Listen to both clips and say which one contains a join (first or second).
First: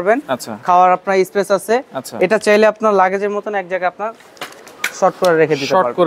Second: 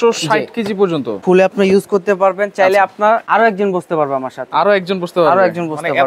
second